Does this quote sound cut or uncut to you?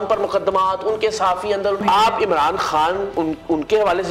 cut